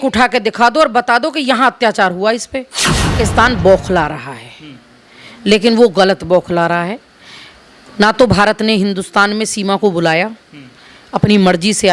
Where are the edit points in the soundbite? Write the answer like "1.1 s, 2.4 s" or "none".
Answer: 3.0 s